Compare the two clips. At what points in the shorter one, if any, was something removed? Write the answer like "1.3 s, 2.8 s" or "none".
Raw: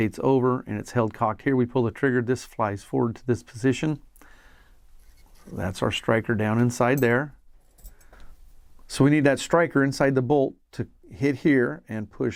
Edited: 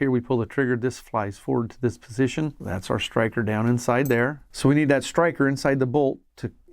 2.6 s, 4.4 s